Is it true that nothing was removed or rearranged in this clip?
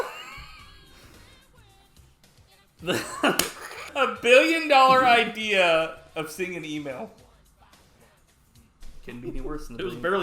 no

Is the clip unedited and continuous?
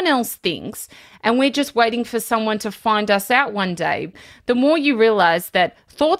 no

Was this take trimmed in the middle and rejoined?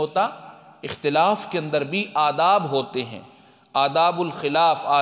no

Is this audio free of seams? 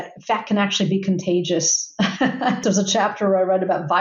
no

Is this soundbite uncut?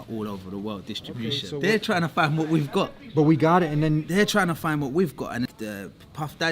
no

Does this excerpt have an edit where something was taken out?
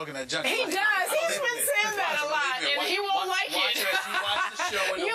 no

